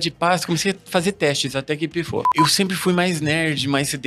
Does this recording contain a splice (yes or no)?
yes